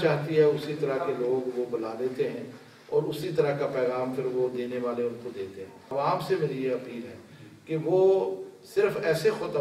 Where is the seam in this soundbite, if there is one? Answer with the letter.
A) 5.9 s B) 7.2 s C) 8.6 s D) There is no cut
A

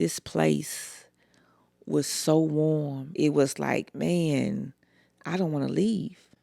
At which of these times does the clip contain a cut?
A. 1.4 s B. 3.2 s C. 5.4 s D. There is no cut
B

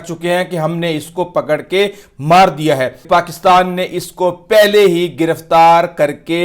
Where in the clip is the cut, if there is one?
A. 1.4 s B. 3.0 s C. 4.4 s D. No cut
B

